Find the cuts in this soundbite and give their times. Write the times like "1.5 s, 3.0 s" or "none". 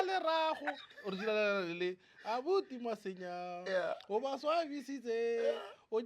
0.9 s